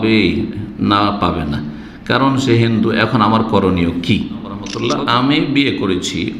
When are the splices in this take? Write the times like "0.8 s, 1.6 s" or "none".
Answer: 4.7 s